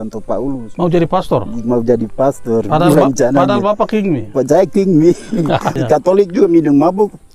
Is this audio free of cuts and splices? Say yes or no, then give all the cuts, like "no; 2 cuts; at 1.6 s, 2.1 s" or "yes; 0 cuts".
no; 1 cut; at 5.8 s